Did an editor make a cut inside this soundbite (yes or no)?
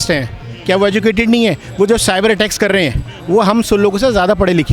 no